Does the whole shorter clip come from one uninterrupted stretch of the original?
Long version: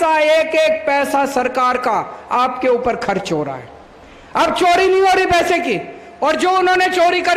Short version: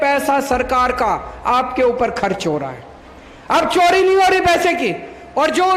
yes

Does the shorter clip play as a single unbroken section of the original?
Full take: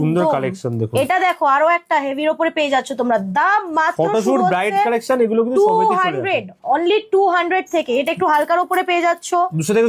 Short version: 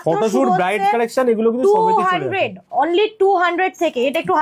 yes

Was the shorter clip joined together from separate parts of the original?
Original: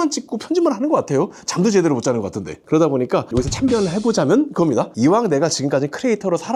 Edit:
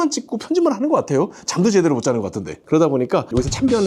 no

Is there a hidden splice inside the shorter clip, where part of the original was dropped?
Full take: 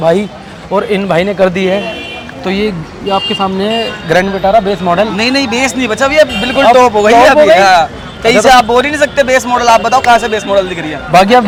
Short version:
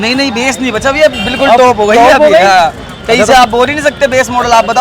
no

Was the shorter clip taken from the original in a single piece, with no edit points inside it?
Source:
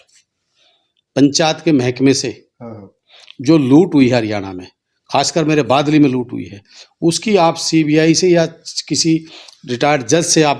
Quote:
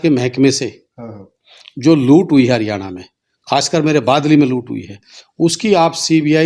yes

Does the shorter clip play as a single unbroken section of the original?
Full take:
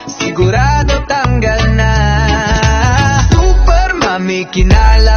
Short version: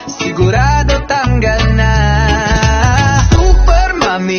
yes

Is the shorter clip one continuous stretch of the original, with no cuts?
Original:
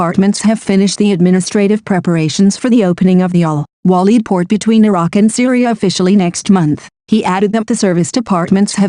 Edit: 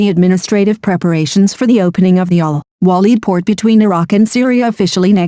yes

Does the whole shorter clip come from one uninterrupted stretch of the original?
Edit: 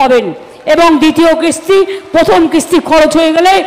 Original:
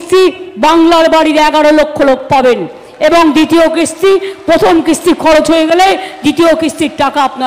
yes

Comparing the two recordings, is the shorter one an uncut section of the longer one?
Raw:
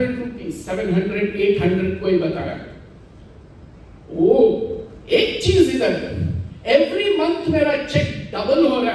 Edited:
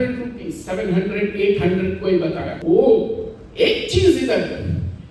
no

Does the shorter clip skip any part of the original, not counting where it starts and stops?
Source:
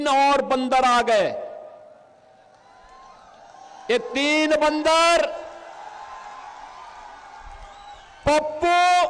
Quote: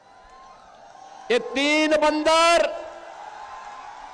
no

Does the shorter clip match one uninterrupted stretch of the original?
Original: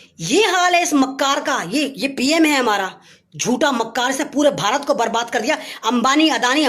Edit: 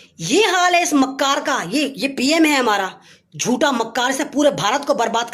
yes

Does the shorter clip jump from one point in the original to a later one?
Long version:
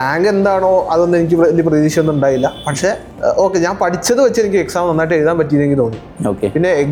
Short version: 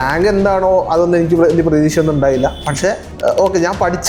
no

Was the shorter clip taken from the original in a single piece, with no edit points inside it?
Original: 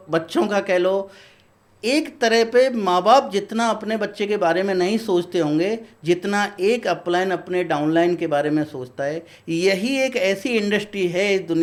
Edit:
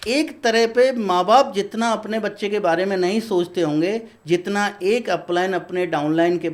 yes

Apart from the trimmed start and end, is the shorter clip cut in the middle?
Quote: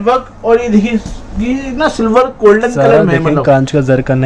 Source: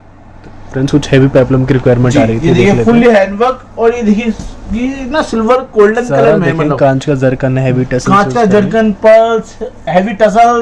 no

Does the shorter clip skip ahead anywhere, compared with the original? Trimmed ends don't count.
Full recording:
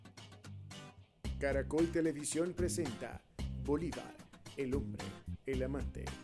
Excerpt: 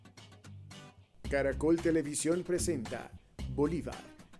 yes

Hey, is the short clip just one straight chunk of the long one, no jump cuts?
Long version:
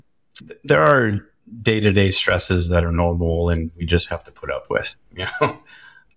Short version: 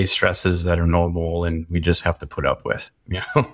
yes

